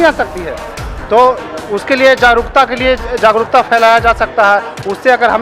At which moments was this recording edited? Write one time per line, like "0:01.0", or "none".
none